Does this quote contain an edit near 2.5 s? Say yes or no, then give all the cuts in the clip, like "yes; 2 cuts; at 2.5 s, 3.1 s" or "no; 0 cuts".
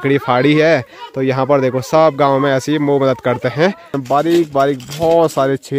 no; 1 cut; at 3.9 s